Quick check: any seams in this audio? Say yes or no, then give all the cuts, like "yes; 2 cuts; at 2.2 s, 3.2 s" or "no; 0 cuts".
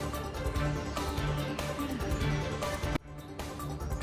no; 0 cuts